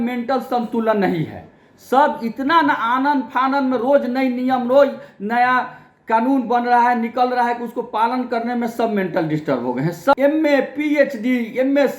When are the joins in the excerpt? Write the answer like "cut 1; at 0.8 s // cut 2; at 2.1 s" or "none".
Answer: cut 1; at 10.1 s